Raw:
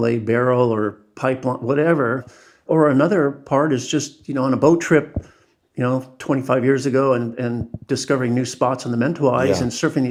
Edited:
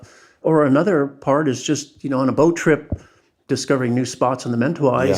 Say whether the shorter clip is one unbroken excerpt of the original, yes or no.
no